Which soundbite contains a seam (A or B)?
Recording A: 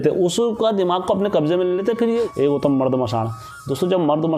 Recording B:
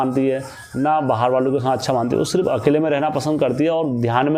A